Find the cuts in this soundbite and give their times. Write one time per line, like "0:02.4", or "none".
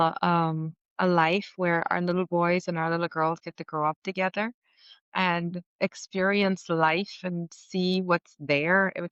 none

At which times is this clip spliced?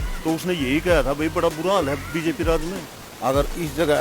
0:03.0

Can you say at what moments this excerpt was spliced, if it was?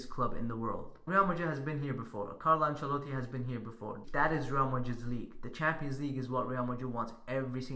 0:00.9
0:04.0

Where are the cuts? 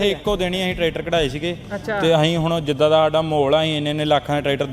none

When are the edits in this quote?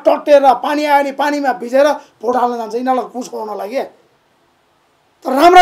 none

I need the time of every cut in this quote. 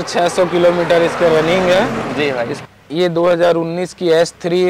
0:02.6

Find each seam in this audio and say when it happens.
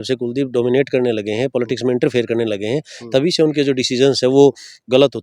none

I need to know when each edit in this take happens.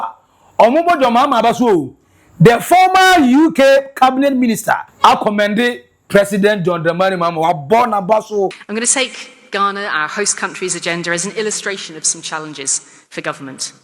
0:04.9
0:08.6

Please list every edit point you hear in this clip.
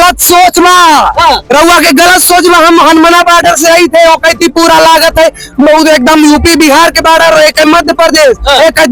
none

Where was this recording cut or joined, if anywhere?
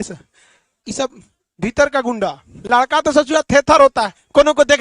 0:02.5

